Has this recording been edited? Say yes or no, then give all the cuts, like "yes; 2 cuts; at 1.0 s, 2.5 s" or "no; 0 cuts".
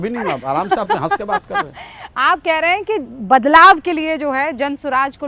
no; 0 cuts